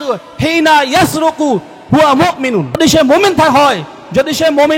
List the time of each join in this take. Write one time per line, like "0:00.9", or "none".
0:02.8